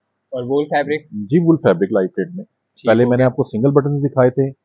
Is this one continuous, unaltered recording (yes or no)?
yes